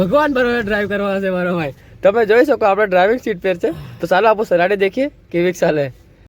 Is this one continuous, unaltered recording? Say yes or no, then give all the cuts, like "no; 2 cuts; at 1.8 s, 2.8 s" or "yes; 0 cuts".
yes; 0 cuts